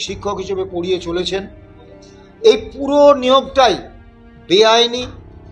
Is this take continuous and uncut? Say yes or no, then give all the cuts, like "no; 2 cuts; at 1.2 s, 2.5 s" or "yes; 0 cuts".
yes; 0 cuts